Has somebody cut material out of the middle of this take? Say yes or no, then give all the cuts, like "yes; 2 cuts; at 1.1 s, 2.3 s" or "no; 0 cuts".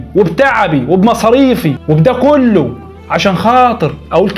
yes; 1 cut; at 1.8 s